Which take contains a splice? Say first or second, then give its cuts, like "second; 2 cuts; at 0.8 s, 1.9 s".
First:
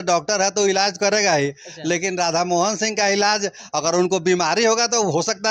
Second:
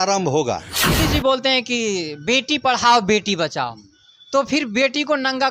second; 1 cut; at 0.9 s